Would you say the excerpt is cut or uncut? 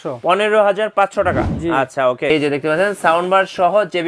cut